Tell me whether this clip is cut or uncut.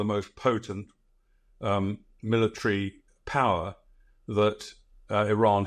uncut